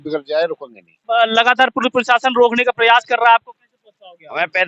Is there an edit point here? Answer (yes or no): yes